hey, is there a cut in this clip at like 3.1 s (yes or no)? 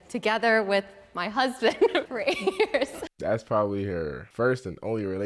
yes